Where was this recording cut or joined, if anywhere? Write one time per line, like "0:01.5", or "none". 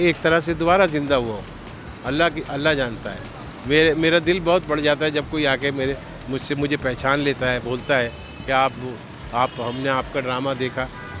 none